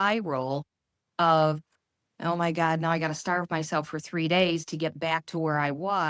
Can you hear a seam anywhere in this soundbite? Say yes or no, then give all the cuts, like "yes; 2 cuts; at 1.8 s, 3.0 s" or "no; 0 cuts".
no; 0 cuts